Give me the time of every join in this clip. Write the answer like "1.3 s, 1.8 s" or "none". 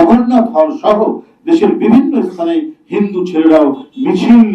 none